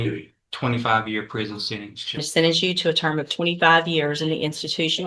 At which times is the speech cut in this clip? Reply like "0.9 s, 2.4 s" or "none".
2.2 s